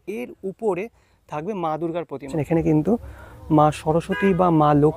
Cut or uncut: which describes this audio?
cut